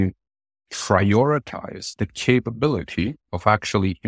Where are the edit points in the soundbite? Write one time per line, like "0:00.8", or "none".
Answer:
none